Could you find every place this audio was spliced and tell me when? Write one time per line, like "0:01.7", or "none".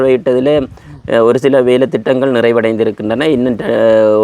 none